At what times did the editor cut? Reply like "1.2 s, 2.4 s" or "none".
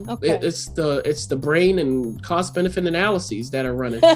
none